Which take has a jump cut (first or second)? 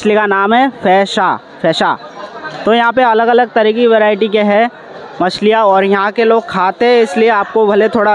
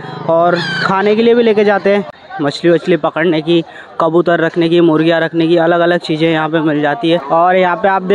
second